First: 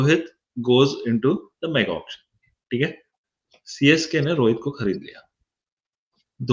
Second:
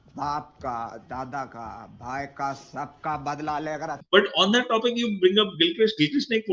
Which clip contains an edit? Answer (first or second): second